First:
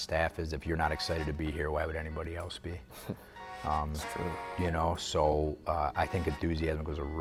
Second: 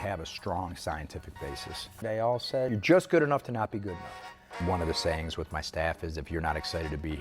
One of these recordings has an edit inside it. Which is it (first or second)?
second